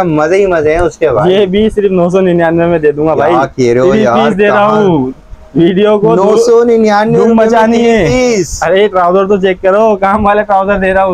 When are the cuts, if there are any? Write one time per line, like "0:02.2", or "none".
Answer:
none